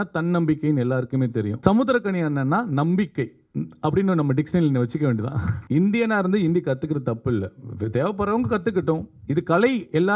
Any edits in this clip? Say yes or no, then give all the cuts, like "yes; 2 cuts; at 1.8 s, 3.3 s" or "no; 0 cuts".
yes; 2 cuts; at 1.5 s, 5.5 s